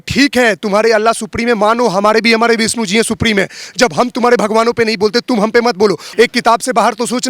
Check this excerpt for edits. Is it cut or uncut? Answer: cut